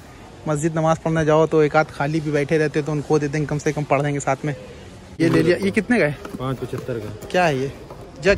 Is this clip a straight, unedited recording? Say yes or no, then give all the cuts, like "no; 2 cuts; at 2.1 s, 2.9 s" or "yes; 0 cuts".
no; 1 cut; at 5.2 s